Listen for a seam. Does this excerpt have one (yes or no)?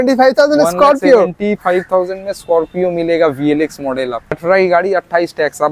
yes